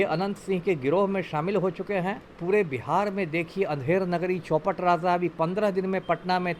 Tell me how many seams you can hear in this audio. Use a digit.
0